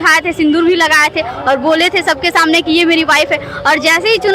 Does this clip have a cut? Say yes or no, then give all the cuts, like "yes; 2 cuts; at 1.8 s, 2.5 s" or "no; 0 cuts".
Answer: no; 0 cuts